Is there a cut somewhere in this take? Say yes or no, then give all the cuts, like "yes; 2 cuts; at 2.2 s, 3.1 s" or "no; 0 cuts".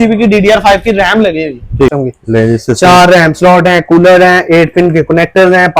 yes; 1 cut; at 1.9 s